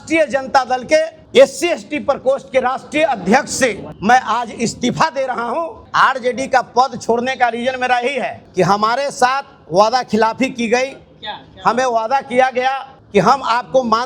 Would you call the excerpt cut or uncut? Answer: cut